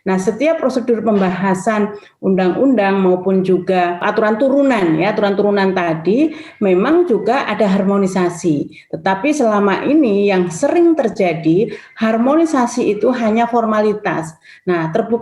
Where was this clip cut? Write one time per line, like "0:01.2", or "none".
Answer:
0:04.1